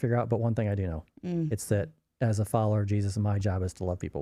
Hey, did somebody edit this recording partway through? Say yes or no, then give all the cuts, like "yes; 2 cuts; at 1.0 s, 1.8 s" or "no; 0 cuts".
no; 0 cuts